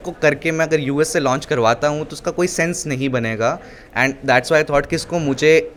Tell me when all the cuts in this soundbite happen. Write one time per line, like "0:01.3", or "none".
none